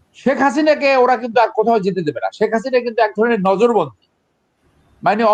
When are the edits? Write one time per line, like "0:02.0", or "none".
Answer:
none